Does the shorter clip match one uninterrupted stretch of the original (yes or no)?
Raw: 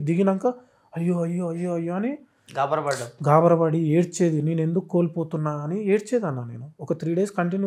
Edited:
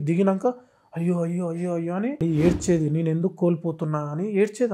no